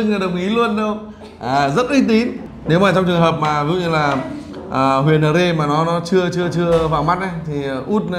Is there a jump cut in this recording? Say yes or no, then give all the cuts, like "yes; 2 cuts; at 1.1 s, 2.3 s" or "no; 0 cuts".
yes; 1 cut; at 2.4 s